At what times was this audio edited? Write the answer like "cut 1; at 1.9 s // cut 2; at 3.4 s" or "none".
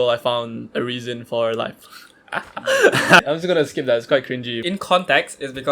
cut 1; at 3.2 s // cut 2; at 4.5 s

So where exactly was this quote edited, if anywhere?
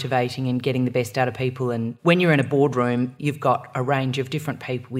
cut 1; at 1.9 s // cut 2; at 3.1 s

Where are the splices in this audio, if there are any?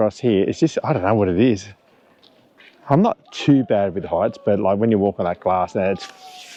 none

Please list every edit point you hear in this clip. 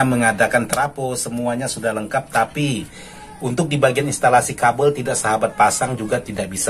none

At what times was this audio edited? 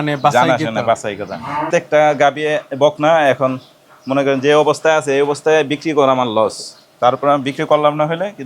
cut 1; at 1.7 s

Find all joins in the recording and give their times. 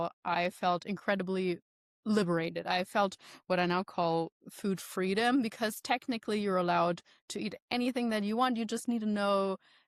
none

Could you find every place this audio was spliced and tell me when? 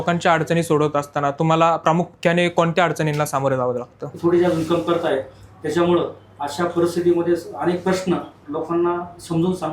cut 1; at 4.0 s

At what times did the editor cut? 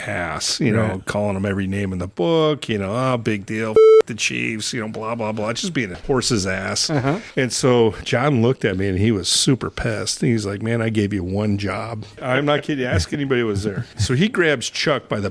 cut 1; at 6.0 s // cut 2; at 12.1 s

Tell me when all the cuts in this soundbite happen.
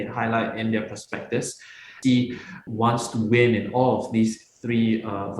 cut 1; at 1.9 s // cut 2; at 2.6 s

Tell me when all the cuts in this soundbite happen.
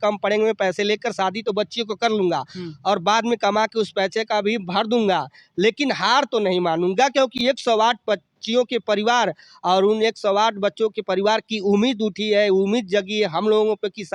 none

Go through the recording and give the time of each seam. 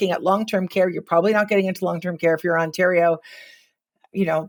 none

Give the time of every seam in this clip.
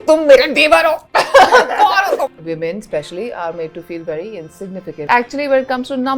cut 1; at 2.3 s

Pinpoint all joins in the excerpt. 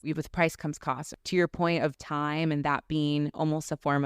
cut 1; at 1.1 s

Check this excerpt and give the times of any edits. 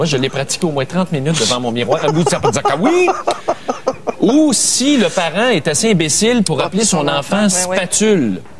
cut 1; at 1.7 s

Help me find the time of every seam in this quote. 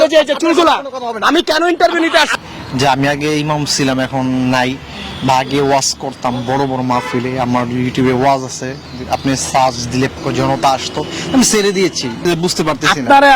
cut 1; at 2.4 s // cut 2; at 10.1 s // cut 3; at 12.3 s

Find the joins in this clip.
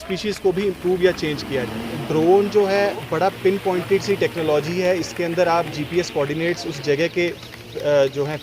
cut 1; at 2.0 s

